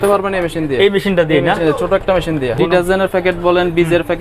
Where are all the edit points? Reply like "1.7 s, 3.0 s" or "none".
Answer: 2.5 s